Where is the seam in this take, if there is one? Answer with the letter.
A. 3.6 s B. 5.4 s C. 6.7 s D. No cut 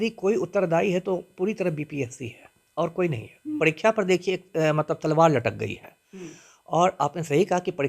A